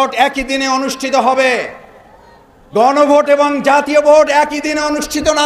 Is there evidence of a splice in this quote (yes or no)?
no